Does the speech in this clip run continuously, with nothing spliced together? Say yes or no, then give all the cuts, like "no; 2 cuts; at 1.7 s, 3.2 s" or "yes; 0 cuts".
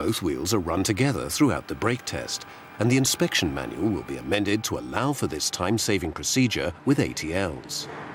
yes; 0 cuts